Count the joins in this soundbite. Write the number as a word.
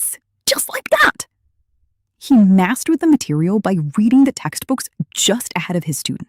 zero